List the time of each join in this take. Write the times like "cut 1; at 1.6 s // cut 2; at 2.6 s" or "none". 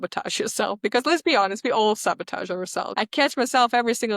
cut 1; at 2.9 s